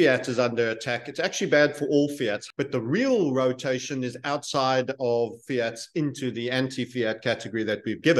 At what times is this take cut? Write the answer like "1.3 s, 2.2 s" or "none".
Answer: 2.4 s